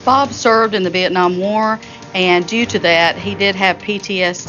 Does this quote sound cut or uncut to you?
uncut